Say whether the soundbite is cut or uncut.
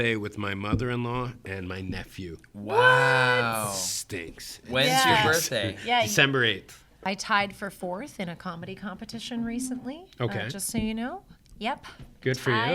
cut